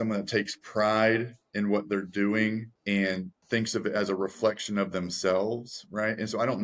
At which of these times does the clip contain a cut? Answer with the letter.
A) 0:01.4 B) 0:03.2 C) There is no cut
B